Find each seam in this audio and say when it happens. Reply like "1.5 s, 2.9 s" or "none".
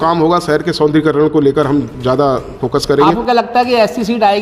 3.2 s